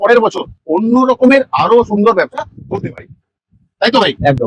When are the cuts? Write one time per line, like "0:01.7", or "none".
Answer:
none